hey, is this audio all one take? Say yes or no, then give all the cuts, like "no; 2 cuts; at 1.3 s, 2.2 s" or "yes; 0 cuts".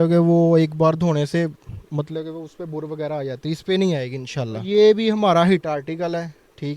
no; 1 cut; at 4.7 s